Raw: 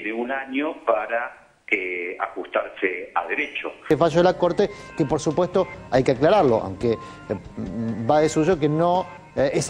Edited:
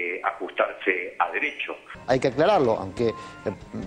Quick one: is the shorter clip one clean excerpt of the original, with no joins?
no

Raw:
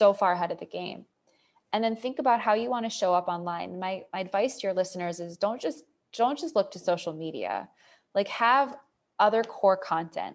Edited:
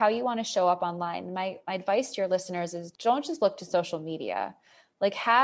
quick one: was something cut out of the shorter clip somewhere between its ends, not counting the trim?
yes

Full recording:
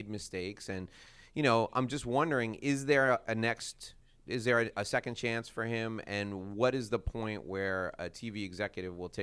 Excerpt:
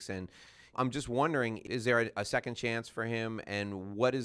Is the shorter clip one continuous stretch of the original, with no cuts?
no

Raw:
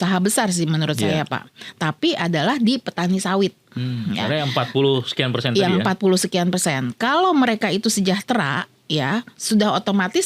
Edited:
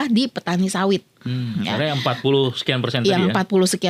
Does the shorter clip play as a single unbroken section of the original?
yes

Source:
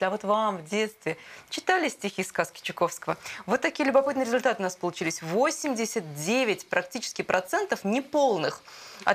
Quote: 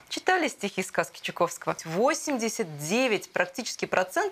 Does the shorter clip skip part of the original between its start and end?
yes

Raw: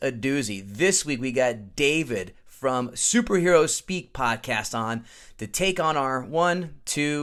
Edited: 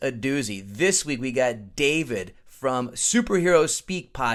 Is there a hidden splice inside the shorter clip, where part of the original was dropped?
no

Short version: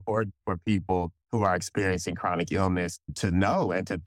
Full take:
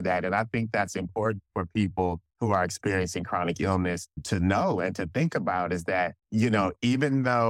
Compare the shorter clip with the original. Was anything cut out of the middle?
no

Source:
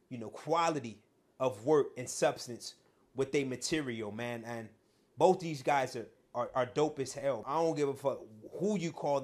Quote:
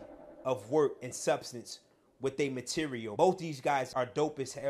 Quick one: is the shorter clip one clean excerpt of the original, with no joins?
no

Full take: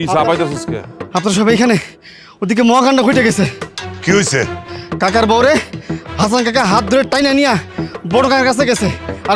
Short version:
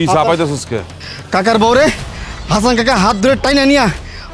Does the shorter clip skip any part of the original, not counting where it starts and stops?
yes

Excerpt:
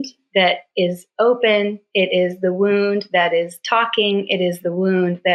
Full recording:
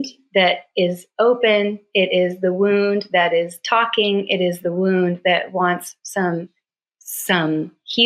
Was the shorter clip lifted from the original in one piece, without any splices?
yes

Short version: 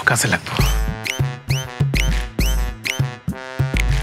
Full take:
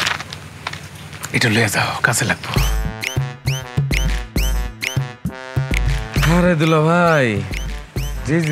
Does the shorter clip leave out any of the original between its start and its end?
no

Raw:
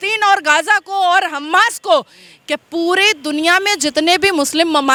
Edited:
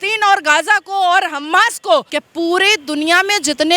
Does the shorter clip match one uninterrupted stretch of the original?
no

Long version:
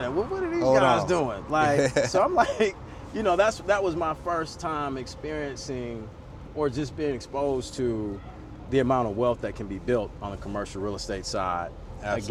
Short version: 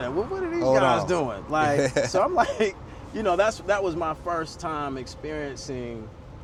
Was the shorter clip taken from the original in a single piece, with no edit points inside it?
yes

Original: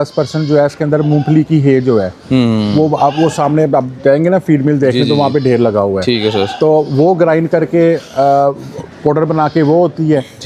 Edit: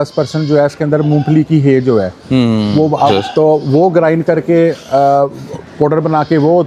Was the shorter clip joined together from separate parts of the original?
yes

